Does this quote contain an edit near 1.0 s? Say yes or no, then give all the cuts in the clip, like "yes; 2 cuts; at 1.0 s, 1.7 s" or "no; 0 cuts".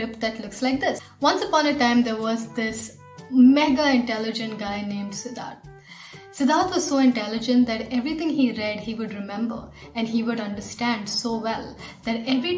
yes; 1 cut; at 1.0 s